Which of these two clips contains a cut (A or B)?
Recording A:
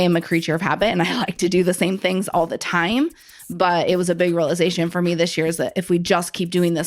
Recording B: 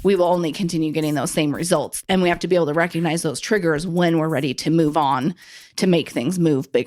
B